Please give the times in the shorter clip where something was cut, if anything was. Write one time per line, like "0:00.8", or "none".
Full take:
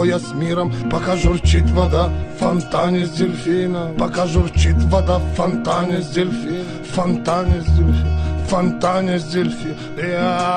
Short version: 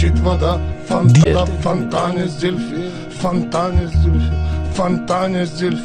0:01.3